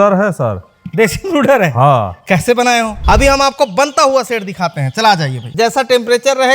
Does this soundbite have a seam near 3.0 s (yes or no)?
yes